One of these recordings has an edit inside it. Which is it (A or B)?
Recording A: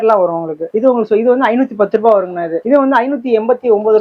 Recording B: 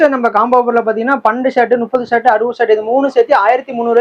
A